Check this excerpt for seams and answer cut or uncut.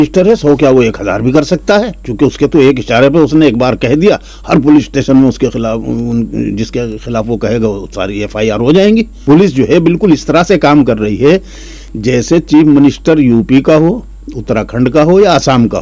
cut